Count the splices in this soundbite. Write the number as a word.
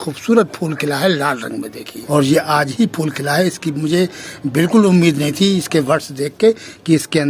one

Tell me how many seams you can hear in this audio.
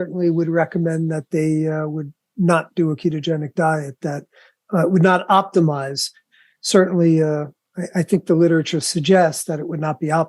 zero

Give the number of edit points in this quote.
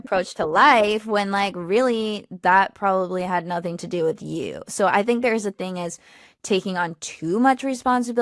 zero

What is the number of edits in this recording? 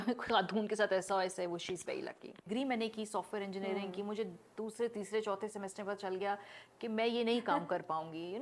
one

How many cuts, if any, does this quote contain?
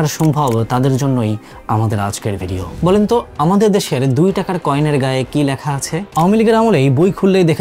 two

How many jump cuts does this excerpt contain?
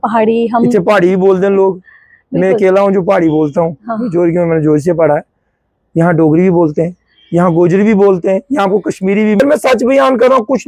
one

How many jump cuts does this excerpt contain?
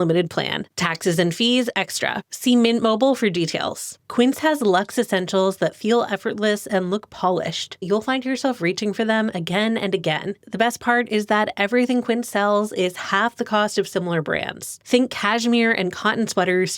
four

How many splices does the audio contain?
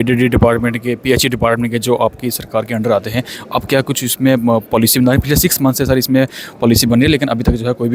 zero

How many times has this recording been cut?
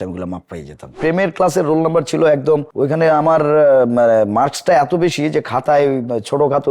zero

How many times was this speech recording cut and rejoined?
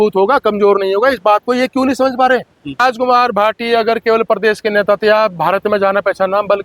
one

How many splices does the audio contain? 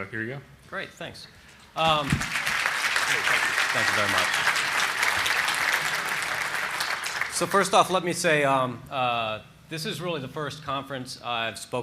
one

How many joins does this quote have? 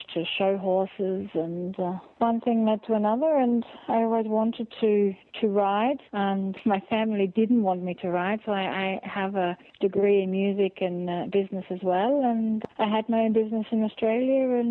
four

